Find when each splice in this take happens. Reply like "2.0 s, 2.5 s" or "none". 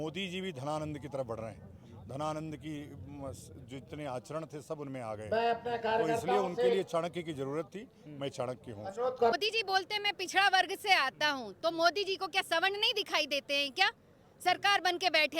9.4 s